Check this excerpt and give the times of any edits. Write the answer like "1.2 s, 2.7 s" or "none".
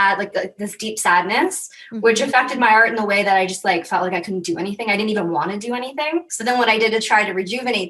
6.3 s